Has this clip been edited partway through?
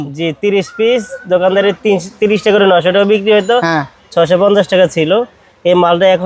no; 0 cuts

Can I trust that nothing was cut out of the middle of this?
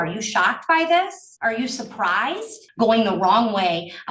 no; 2 cuts; at 1.2 s, 2.6 s

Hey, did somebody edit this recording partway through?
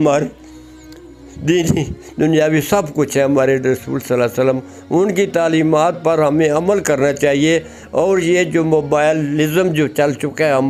no; 0 cuts

